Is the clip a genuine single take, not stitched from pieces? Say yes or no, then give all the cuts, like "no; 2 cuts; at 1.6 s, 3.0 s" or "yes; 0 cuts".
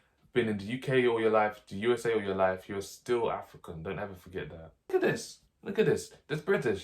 no; 1 cut; at 4.9 s